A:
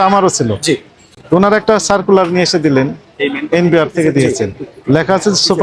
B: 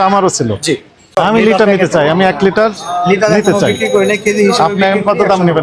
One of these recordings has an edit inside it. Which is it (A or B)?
B